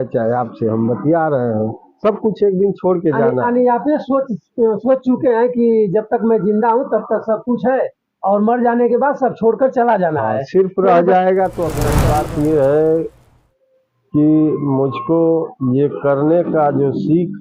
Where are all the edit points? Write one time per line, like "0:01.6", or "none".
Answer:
0:11.9

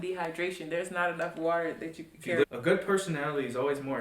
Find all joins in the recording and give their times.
0:02.4

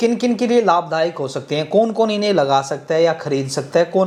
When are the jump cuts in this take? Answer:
none

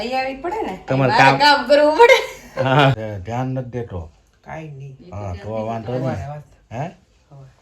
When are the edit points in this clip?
0:03.0

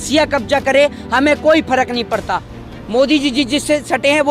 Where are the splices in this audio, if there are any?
0:02.5

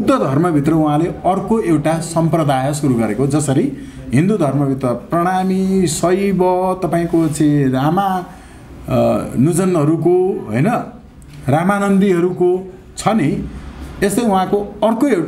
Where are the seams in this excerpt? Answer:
none

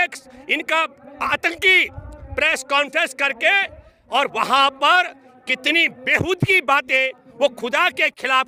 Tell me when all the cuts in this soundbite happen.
none

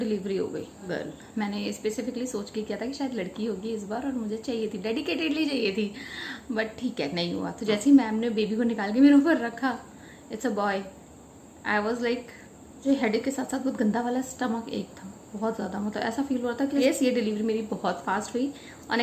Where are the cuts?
0:00.8
0:12.8
0:16.8

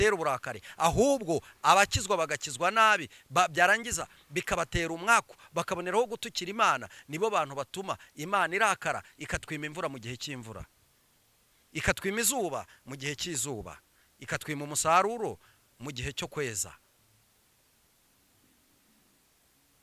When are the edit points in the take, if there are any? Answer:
none

